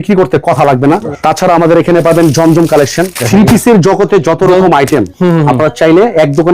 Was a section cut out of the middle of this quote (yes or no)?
yes